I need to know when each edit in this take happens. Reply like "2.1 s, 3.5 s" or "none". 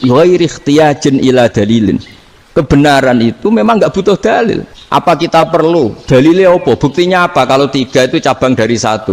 4.7 s